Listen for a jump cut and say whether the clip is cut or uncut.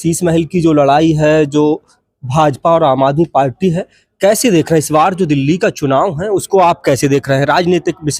uncut